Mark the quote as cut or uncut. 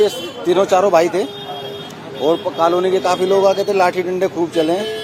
uncut